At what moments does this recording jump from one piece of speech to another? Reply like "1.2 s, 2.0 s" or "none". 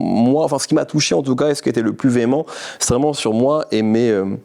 none